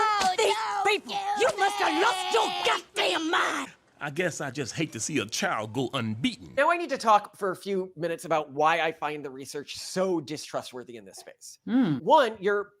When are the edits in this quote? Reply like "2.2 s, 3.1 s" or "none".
6.5 s